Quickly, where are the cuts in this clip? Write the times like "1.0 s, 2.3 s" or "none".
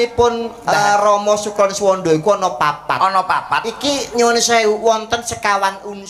none

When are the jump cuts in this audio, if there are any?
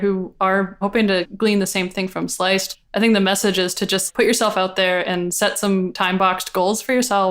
1.0 s, 2.7 s, 4.1 s, 5.9 s

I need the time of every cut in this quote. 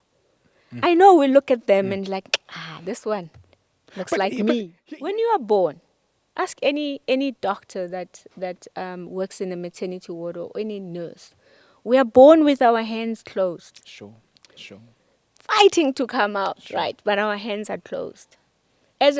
4.7 s

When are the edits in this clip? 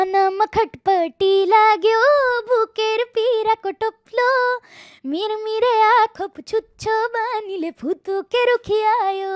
none

